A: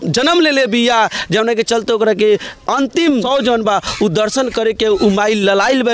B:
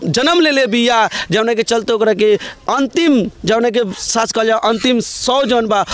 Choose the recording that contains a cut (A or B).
A